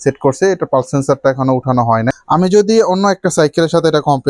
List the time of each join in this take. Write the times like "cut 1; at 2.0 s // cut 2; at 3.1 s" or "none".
cut 1; at 2.1 s